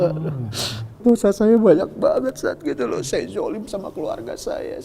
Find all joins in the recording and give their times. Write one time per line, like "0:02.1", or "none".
0:01.0